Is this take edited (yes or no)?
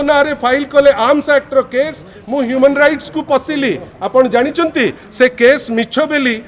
no